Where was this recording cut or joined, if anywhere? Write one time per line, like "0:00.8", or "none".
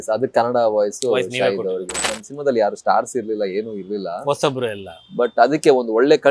0:02.2